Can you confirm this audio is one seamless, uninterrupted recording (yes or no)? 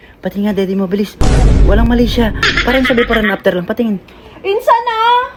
yes